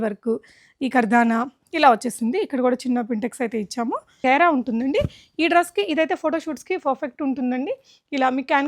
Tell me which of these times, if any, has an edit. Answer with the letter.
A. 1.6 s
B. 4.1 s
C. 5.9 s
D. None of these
B